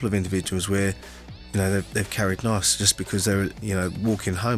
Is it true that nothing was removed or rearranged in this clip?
no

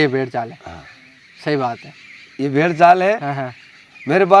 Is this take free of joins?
yes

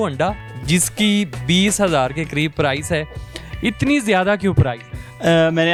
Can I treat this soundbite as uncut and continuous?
yes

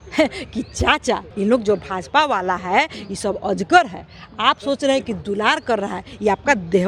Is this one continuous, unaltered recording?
no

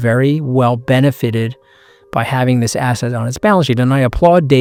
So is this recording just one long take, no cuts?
yes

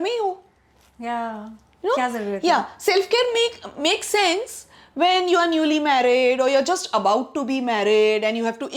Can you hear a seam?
no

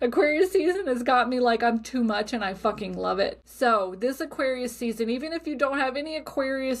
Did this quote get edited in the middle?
yes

